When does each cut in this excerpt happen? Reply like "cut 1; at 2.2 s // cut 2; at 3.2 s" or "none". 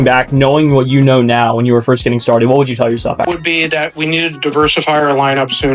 cut 1; at 3.3 s